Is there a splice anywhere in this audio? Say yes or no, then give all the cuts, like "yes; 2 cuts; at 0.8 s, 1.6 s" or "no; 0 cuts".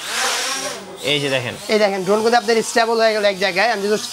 no; 0 cuts